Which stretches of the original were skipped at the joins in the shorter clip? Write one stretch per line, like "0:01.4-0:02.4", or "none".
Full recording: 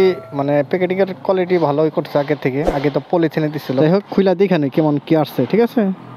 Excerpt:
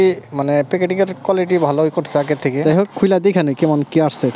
0:02.6-0:03.8